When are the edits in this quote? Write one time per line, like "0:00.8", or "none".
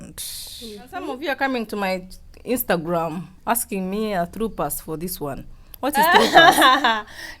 0:01.1